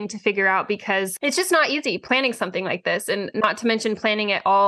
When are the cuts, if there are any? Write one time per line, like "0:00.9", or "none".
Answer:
0:01.1
0:02.0
0:03.3